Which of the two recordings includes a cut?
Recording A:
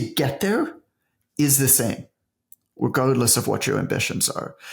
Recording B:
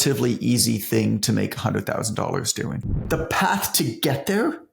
B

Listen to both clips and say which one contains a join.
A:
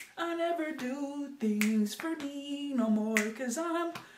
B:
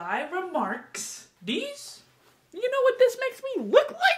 B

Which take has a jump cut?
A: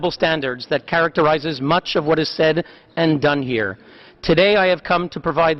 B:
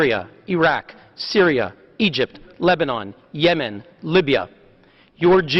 A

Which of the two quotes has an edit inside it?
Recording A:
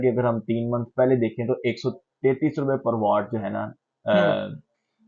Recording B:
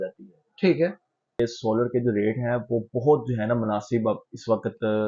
B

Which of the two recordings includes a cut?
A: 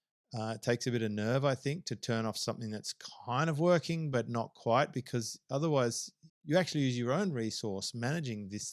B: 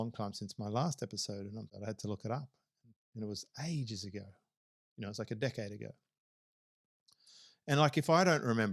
B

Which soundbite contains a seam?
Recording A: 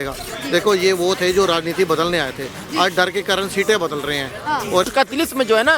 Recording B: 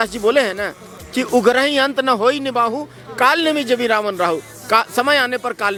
A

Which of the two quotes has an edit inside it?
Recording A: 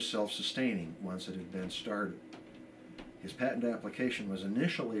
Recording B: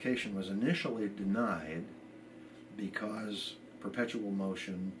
A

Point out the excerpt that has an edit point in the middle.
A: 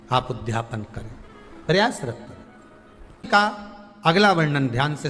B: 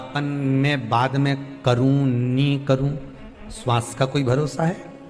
A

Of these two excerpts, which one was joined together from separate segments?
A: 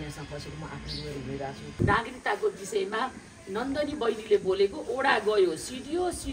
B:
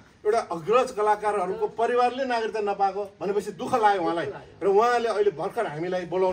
A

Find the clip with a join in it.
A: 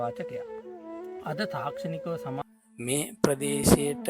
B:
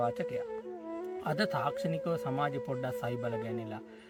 A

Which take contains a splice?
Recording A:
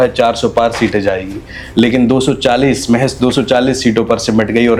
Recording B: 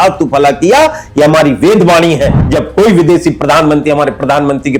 B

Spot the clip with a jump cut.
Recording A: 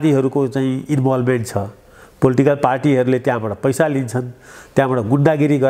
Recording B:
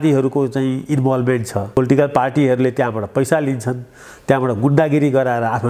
B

